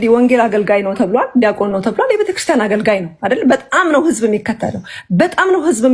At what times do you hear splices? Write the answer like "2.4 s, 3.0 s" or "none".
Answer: none